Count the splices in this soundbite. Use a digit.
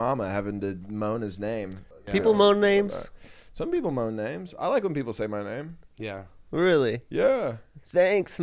1